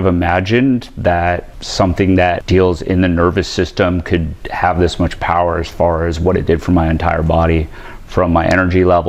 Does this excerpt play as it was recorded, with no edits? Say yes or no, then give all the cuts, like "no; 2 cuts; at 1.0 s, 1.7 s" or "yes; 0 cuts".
no; 2 cuts; at 1.6 s, 2.4 s